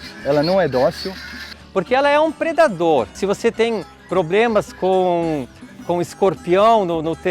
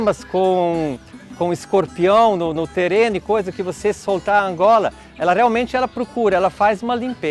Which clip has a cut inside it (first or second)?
first